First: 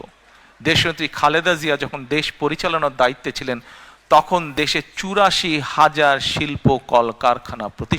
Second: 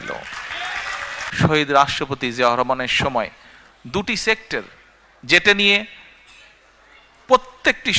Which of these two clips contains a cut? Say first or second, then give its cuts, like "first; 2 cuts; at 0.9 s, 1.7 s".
second; 1 cut; at 1.2 s